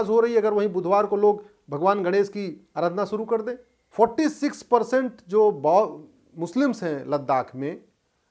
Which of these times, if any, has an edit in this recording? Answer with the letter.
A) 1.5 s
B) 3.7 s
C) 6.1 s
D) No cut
B